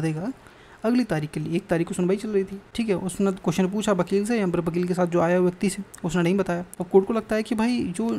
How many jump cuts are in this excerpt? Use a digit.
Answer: 2